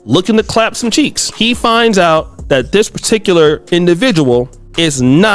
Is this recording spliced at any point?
yes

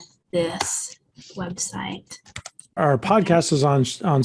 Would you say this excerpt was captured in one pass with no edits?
no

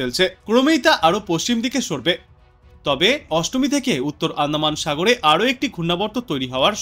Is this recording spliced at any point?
yes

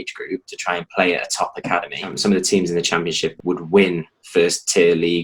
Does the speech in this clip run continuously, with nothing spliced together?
no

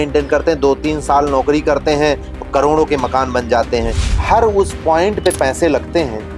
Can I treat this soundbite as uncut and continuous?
no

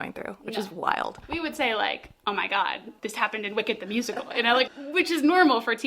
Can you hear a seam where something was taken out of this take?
yes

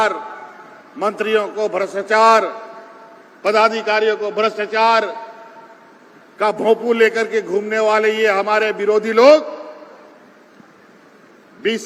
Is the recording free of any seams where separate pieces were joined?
yes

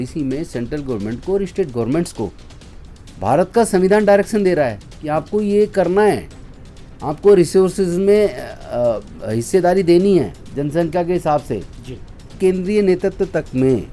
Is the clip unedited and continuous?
no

